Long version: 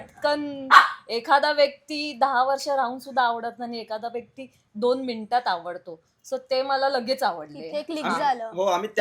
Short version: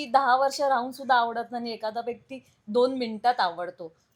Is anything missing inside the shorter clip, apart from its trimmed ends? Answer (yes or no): no